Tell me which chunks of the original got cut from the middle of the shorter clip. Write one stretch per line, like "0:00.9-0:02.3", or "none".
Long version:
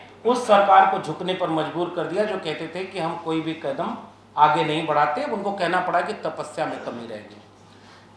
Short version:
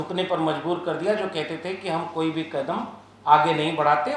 none